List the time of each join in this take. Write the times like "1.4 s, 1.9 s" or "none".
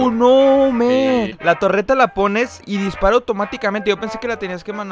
1.3 s, 2.6 s